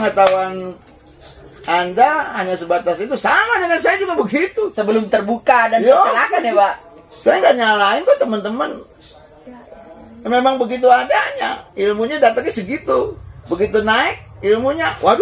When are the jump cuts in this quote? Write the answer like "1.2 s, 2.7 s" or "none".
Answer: none